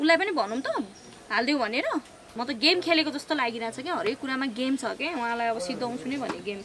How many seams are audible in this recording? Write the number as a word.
one